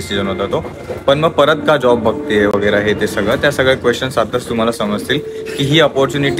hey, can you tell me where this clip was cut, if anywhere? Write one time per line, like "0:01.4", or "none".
none

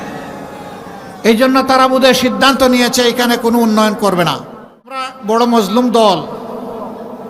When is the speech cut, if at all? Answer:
0:05.1

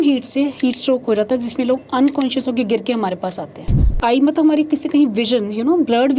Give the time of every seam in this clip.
0:03.8

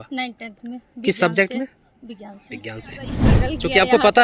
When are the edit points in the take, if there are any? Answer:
0:03.3

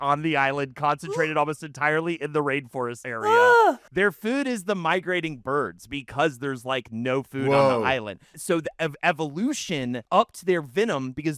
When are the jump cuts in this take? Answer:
0:03.0
0:03.9
0:08.3
0:10.0

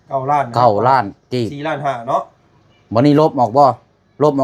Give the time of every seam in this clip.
none

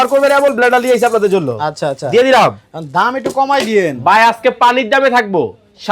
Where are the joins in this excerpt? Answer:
none

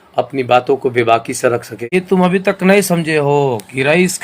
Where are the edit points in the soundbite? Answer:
0:01.9

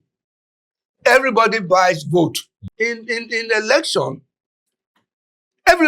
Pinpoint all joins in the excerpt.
0:02.6

